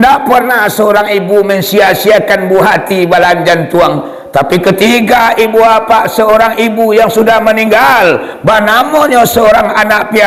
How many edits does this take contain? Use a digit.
0